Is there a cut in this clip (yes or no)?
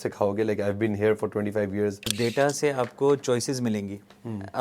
yes